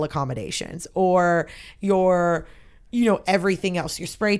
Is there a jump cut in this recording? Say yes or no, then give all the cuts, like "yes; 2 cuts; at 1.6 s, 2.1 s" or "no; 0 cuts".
no; 0 cuts